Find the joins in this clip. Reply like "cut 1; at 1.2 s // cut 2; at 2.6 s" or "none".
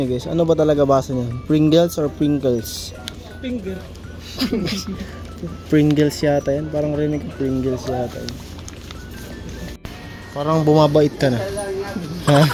none